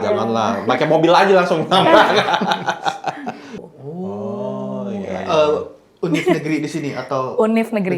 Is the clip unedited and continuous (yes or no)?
no